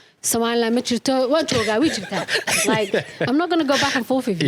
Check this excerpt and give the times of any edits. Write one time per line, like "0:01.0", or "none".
none